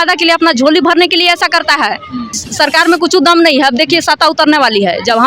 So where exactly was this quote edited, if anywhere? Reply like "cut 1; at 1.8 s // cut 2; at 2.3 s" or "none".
cut 1; at 2.5 s